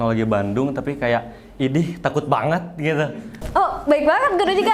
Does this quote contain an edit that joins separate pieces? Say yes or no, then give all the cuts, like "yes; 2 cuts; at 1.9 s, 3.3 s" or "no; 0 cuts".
yes; 1 cut; at 3.4 s